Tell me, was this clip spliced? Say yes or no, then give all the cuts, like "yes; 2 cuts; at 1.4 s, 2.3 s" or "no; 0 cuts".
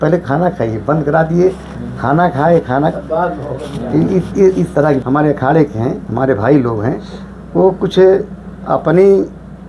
yes; 1 cut; at 5.0 s